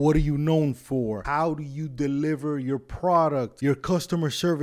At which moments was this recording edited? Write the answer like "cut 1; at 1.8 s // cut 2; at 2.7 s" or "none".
cut 1; at 1.2 s // cut 2; at 3.5 s